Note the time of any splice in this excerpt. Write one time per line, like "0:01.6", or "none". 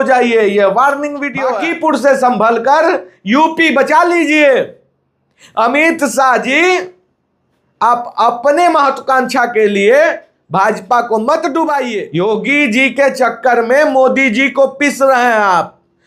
0:01.5
0:12.0